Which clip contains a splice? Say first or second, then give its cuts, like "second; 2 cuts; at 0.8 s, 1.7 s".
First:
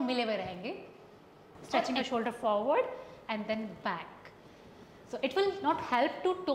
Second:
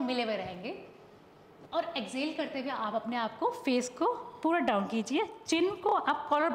first; 1 cut; at 1.9 s